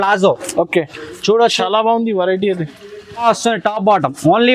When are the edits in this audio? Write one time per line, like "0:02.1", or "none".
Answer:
0:03.2